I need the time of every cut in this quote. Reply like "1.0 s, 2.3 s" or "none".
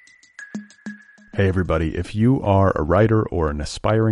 0.9 s